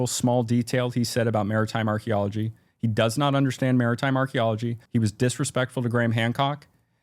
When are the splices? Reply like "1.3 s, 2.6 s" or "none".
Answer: 4.8 s